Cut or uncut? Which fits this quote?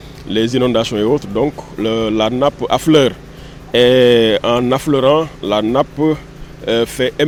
uncut